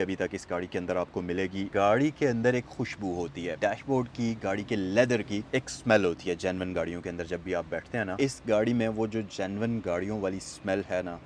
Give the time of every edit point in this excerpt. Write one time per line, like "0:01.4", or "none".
0:01.7
0:03.6
0:08.1